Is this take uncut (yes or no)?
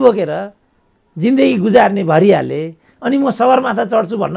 yes